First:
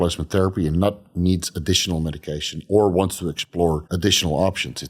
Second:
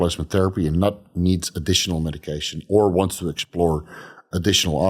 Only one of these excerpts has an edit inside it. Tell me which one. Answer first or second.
first